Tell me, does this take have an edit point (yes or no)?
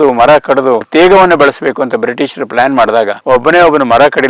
yes